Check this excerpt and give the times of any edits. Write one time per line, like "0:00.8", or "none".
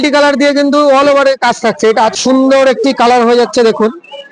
0:02.1